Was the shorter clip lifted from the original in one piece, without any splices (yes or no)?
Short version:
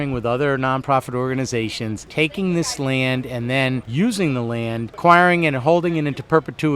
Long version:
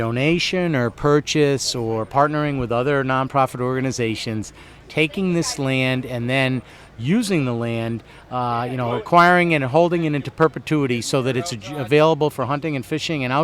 no